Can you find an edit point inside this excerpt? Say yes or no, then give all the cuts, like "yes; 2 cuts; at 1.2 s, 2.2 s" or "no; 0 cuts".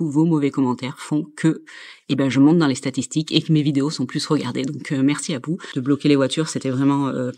yes; 1 cut; at 5.7 s